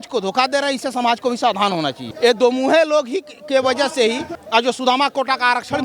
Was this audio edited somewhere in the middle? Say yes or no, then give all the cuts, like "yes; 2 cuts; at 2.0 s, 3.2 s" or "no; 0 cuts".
yes; 2 cuts; at 2.0 s, 4.3 s